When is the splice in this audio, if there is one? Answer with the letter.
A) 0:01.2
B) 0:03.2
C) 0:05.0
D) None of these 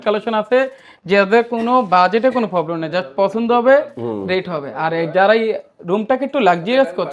D